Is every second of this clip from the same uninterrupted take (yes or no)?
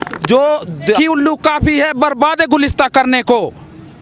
no